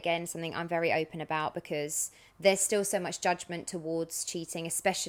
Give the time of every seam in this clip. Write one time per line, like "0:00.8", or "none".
none